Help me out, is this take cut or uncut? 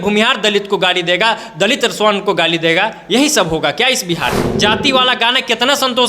cut